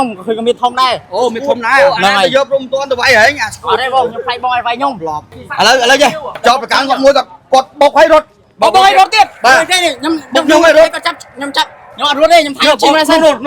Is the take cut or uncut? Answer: cut